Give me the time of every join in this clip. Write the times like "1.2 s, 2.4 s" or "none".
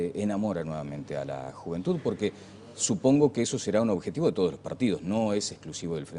2.8 s